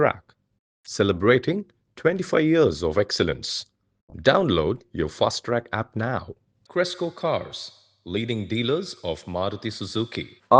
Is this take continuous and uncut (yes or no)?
yes